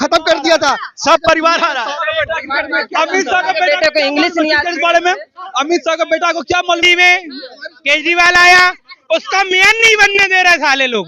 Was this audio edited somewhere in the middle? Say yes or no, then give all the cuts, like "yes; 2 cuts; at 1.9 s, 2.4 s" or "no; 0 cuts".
yes; 1 cut; at 6.8 s